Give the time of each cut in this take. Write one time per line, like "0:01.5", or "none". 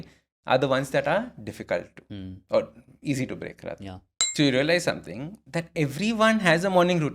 0:04.2

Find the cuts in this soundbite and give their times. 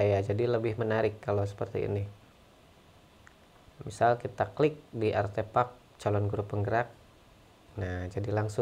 none

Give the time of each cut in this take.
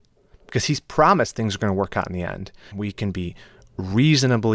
0:02.6

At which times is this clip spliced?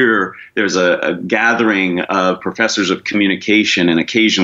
none

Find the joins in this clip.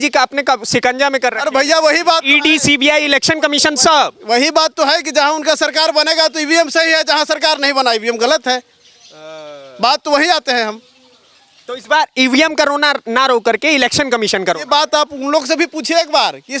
none

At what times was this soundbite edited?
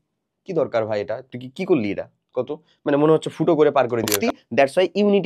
0:04.2

